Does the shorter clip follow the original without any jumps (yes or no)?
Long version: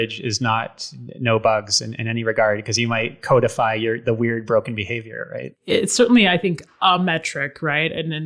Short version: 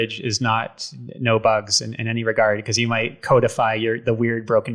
yes